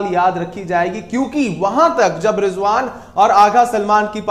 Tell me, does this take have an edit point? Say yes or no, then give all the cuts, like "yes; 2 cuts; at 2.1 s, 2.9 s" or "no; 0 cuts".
no; 0 cuts